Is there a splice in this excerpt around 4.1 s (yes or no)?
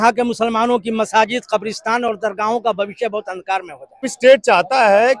yes